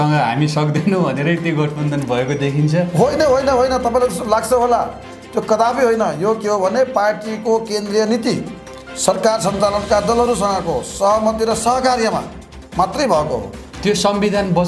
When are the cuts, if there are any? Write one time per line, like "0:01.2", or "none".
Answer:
0:13.6

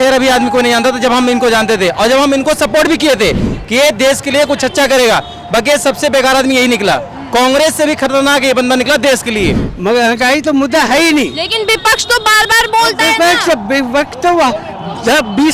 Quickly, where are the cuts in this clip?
0:09.5

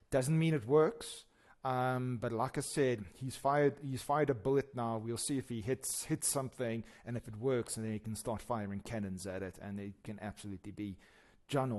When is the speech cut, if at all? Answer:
none

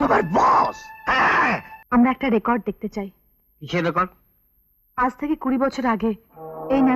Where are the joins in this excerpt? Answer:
0:01.7

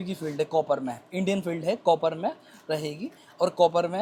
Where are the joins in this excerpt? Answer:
none

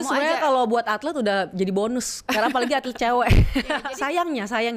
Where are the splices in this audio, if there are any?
0:03.9

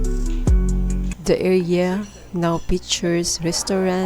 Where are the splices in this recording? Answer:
0:00.9

